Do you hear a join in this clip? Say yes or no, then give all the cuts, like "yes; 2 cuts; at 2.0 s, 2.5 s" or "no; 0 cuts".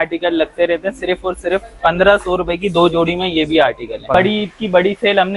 yes; 1 cut; at 4.1 s